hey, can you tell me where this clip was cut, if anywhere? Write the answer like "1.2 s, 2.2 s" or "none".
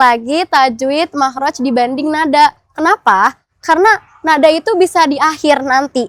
none